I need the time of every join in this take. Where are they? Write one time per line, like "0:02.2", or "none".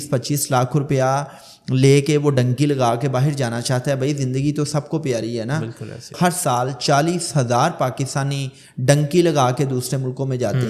0:06.1